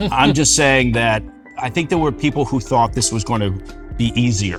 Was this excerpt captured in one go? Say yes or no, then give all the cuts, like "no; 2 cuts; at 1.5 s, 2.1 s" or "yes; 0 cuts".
yes; 0 cuts